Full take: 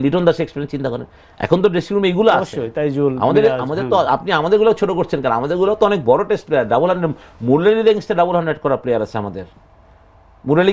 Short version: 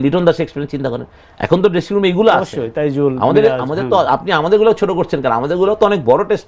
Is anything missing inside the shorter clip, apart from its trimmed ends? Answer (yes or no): no